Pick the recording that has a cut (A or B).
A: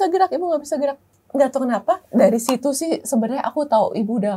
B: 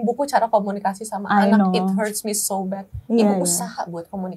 A